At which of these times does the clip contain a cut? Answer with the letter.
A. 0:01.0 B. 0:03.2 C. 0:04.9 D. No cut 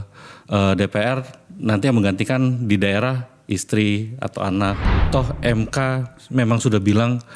C